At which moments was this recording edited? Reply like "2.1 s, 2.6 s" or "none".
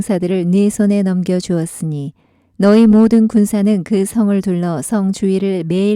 2.1 s